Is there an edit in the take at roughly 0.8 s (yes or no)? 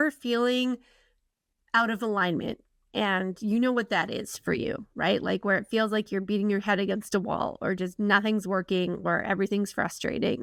no